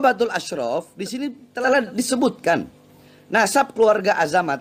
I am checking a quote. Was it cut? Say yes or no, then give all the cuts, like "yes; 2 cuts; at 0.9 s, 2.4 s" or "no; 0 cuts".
yes; 1 cut; at 1.5 s